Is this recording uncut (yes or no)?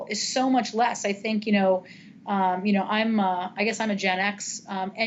yes